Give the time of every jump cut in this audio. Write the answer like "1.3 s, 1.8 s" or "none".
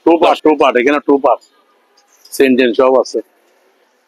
none